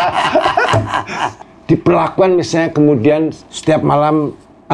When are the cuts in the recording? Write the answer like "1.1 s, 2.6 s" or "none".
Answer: 1.3 s, 3.5 s